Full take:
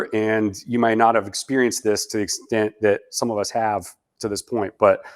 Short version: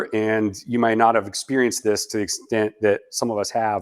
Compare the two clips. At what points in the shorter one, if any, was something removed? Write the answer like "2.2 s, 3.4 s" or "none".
none